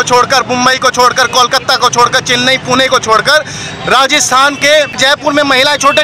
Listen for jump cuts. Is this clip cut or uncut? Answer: cut